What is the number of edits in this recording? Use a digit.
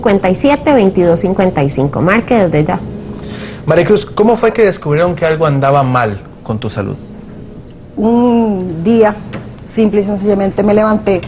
1